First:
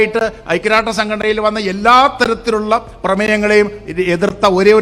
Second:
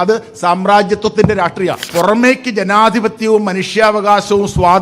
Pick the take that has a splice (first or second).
second